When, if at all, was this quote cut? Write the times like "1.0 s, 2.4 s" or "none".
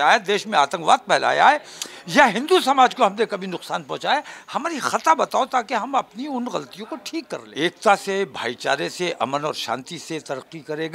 7.4 s